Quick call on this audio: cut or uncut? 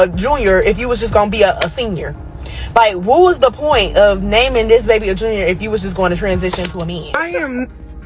cut